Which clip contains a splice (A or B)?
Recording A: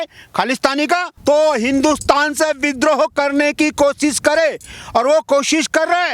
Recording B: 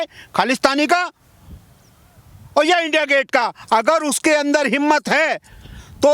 A